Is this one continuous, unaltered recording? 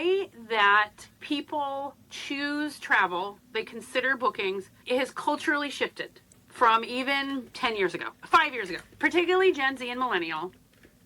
no; 4 cuts; at 1.1 s, 2.1 s, 4.7 s, 8.8 s

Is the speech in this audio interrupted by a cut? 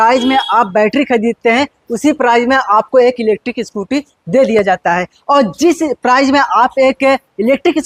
no; 0 cuts

